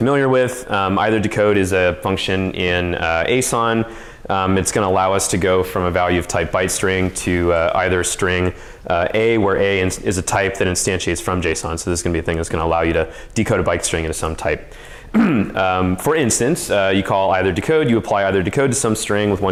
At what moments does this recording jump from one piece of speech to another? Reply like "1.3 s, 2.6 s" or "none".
none